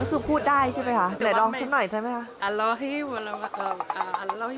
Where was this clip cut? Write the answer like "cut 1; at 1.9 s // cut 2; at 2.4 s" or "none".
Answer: cut 1; at 1.2 s // cut 2; at 2.3 s